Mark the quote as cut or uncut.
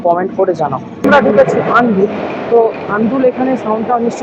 cut